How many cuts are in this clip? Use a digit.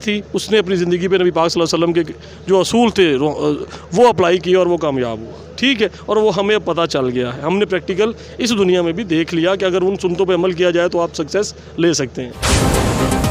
1